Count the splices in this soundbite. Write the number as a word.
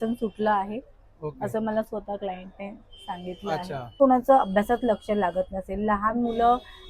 one